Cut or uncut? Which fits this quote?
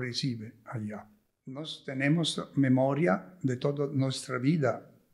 cut